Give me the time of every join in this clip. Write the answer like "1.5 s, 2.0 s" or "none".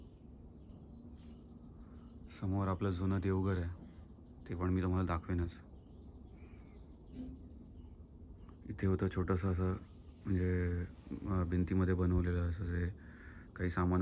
none